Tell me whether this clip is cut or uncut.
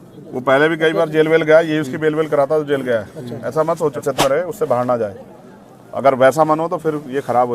cut